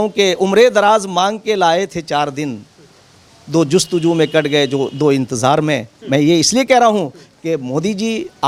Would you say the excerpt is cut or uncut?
uncut